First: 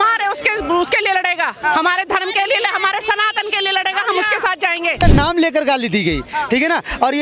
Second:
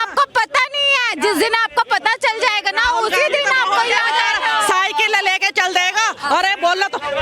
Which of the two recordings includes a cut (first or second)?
first